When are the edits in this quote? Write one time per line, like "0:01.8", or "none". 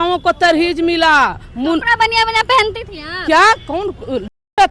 none